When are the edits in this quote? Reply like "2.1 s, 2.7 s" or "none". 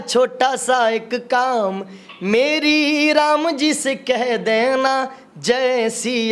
none